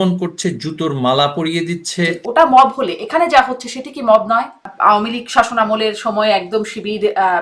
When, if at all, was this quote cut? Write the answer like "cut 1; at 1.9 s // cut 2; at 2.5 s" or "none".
cut 1; at 2.2 s // cut 2; at 4.7 s